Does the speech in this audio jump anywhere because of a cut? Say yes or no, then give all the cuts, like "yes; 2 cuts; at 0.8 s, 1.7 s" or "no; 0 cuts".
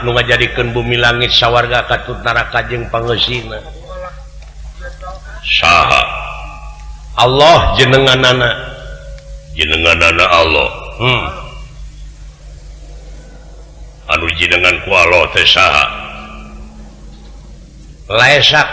no; 0 cuts